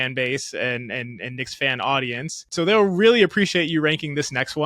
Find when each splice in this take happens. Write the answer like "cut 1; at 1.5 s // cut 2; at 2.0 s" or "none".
cut 1; at 2.4 s